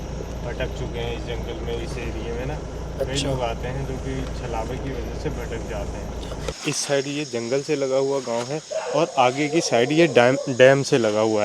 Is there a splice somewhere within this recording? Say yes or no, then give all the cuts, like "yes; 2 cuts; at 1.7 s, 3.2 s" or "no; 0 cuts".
yes; 1 cut; at 6.6 s